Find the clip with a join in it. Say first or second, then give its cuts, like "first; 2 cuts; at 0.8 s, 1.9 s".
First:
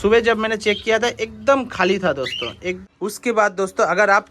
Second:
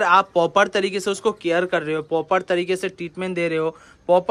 first; 1 cut; at 2.8 s